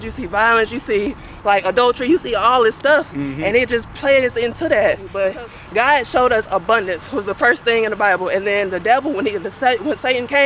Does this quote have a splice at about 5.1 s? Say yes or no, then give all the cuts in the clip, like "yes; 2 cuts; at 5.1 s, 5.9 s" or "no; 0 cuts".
yes; 1 cut; at 5.1 s